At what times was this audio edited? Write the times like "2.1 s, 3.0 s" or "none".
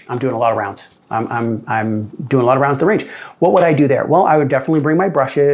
none

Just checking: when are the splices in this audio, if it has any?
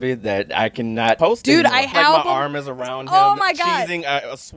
1.2 s, 1.9 s

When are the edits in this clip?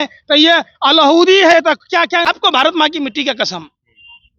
2.2 s

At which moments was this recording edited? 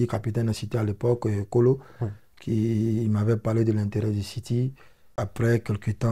5.0 s

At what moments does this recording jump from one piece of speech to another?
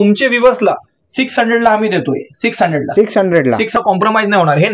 3.8 s

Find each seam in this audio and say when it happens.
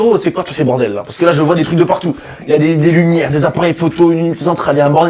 none

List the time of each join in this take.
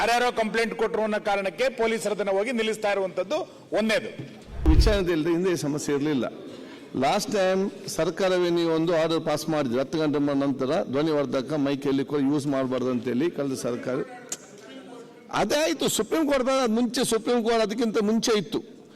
4.7 s

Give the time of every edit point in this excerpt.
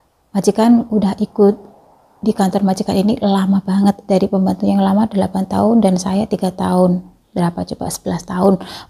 none

